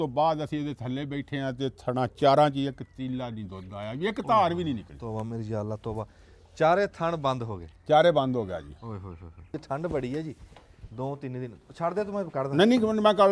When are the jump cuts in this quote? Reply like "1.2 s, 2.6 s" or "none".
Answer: 9.5 s

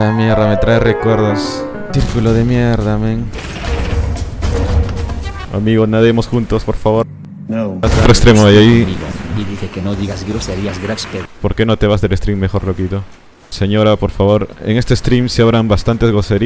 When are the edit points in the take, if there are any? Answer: 8.0 s, 11.3 s

